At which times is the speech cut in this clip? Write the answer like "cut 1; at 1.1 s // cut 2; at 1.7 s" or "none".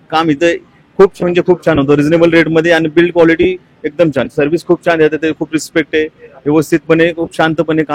none